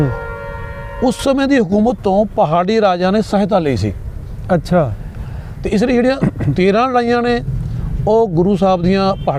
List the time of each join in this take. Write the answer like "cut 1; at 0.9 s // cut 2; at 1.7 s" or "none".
cut 1; at 5.2 s